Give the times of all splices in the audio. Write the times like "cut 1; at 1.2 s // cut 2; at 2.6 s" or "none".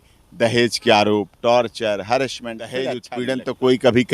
cut 1; at 3.0 s

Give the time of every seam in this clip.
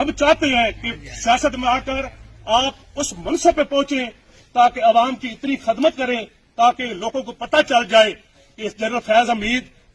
none

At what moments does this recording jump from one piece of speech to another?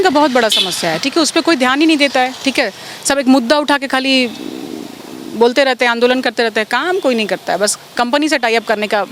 none

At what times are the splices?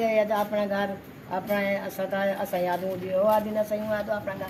none

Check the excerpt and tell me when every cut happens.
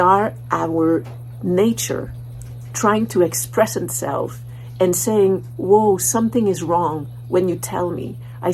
none

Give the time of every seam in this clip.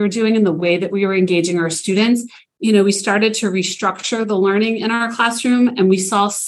cut 1; at 2.4 s

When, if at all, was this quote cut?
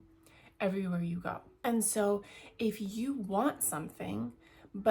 cut 1; at 1.5 s

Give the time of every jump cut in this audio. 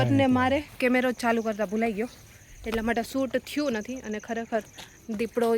none

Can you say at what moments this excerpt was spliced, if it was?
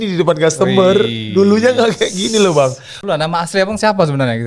cut 1; at 3.0 s

